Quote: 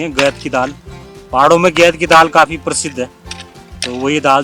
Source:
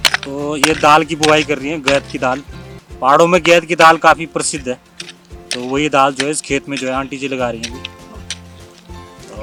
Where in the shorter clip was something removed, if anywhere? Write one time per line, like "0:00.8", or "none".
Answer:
none